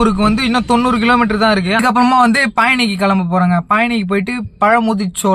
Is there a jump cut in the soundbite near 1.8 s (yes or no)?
yes